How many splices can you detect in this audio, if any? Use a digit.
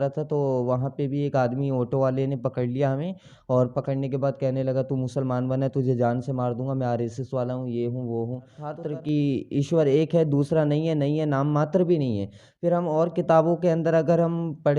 1